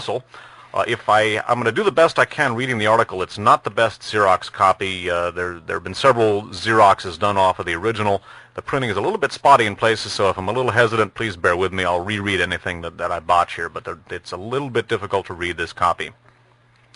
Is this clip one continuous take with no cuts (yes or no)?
no